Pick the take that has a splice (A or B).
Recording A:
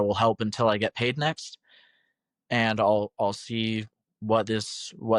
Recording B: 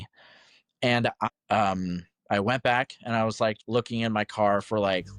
B